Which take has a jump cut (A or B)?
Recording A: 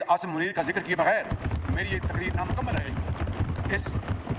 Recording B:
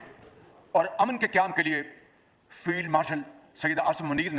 A